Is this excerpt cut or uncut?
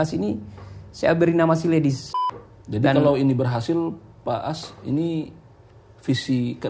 cut